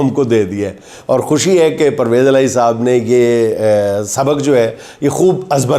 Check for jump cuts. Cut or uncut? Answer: uncut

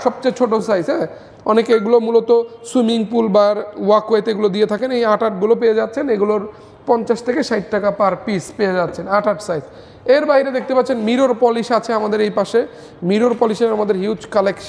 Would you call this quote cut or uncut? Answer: uncut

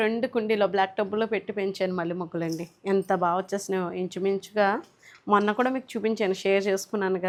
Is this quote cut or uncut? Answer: uncut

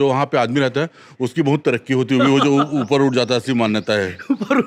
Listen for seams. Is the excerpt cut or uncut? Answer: uncut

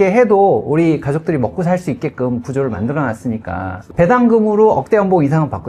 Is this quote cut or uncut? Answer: cut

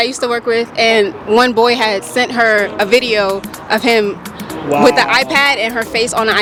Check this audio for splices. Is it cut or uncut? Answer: uncut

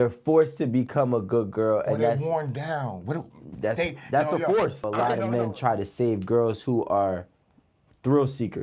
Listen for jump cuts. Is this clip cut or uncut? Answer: cut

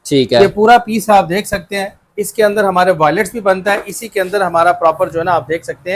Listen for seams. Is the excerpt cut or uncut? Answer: uncut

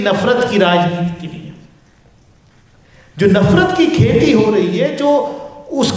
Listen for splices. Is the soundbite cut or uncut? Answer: uncut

